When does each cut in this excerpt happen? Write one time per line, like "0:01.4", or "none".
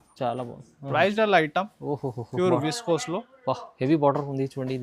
0:01.1